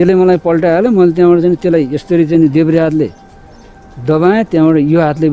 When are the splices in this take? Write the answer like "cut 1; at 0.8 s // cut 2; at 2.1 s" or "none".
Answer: none